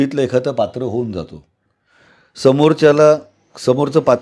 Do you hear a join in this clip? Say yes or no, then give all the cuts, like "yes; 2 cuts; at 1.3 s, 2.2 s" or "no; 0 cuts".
no; 0 cuts